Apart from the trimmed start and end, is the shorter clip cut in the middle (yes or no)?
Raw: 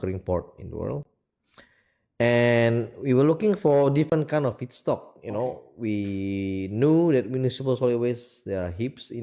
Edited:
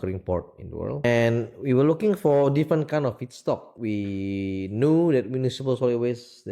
yes